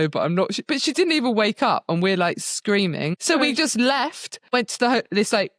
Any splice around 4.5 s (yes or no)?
yes